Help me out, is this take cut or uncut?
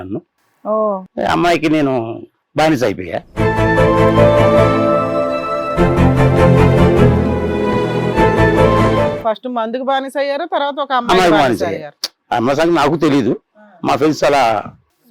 cut